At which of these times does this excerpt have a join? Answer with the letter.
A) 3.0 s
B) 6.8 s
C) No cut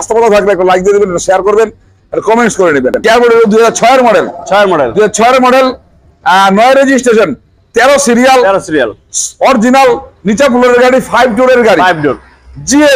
A